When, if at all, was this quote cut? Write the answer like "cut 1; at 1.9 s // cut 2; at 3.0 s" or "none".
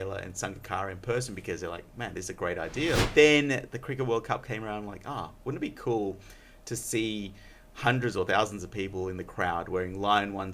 cut 1; at 3.1 s